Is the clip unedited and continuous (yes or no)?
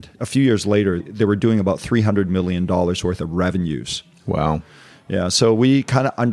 yes